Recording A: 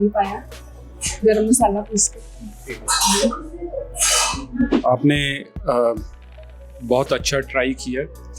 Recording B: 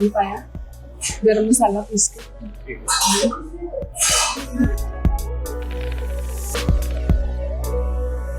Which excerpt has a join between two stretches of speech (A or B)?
A